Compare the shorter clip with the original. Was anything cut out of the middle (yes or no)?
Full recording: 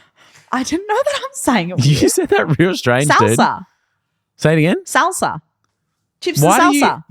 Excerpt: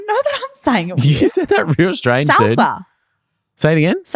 no